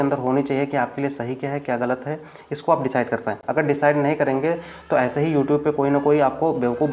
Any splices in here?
no; 0 cuts

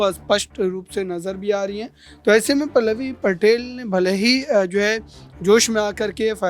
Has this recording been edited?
no; 0 cuts

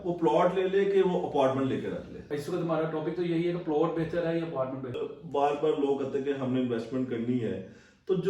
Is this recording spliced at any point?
yes; 2 cuts; at 2.3 s, 5.0 s

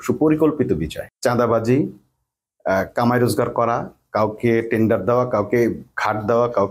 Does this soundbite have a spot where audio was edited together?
yes; 1 cut; at 1.0 s

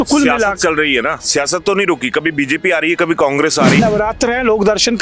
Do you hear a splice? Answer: yes; 1 cut; at 3.8 s

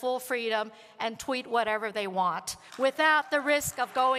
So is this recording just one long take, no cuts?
yes; 0 cuts

